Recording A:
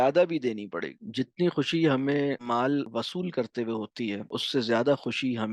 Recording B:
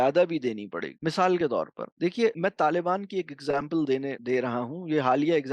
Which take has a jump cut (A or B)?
A